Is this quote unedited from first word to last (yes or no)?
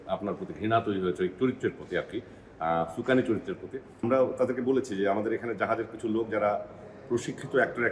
no